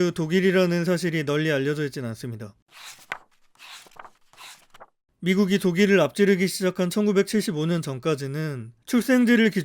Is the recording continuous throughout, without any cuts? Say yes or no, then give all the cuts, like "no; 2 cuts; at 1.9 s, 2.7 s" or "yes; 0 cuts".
no; 1 cut; at 5.0 s